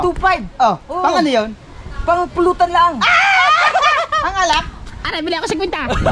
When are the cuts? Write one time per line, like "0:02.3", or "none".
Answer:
none

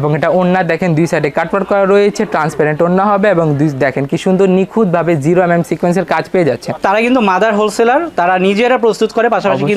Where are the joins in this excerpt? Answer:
0:06.8

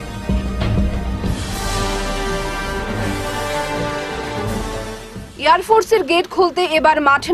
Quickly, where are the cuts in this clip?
none

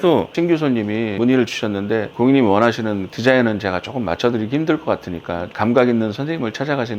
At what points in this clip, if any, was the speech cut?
0:02.1

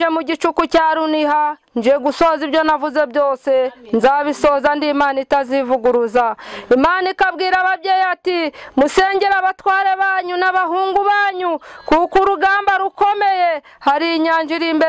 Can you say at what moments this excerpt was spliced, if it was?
none

